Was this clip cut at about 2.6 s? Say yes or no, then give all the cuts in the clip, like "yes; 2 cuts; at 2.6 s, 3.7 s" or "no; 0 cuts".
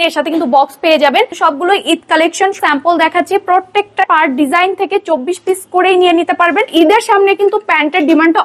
yes; 4 cuts; at 1.3 s, 2.6 s, 4.0 s, 6.7 s